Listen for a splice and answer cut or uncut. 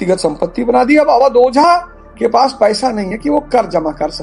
uncut